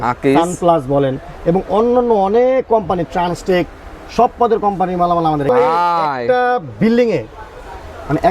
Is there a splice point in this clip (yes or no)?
yes